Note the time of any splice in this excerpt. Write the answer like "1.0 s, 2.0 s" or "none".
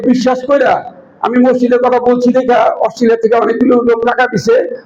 none